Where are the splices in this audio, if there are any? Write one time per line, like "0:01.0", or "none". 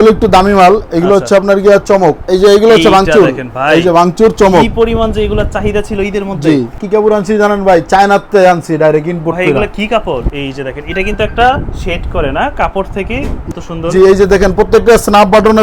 0:02.2
0:06.8
0:10.3
0:13.4